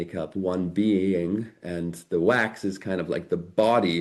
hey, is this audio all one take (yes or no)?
yes